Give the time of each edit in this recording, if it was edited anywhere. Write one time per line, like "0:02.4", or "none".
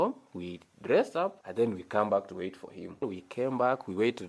0:01.4
0:03.2